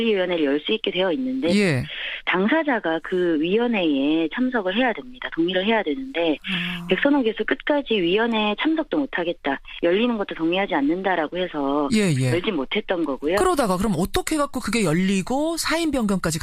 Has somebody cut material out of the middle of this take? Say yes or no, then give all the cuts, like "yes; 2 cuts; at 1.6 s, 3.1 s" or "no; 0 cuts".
no; 0 cuts